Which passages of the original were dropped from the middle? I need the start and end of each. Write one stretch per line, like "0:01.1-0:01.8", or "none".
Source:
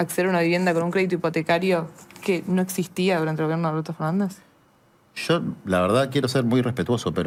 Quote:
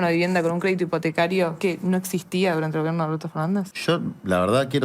0:01.9-0:02.2
0:04.4-0:05.2

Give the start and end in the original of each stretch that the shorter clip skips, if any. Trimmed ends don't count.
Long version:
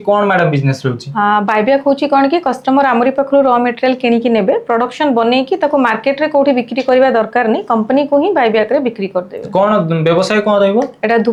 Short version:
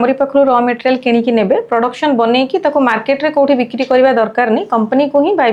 none

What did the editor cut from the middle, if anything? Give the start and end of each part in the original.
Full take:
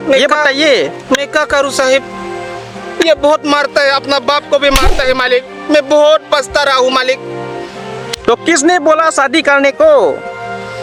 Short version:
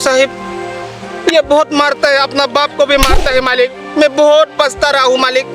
none

